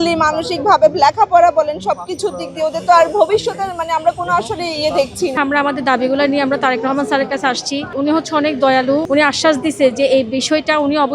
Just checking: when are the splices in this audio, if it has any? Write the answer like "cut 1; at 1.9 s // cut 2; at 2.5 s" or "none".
cut 1; at 5.3 s // cut 2; at 7.9 s // cut 3; at 9.1 s